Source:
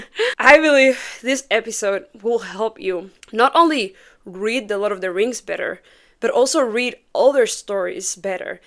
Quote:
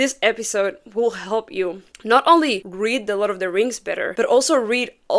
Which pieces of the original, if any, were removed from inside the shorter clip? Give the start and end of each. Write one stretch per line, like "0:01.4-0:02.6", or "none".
0:03.9-0:04.3
0:05.7-0:06.1